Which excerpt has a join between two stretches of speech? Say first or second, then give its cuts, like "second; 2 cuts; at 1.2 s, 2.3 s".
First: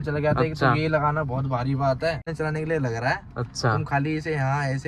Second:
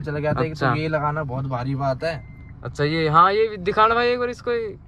first; 1 cut; at 2.3 s